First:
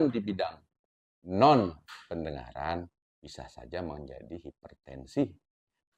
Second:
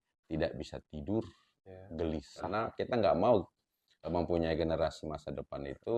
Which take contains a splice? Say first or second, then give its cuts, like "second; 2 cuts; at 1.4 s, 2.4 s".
second; 1 cut; at 2.5 s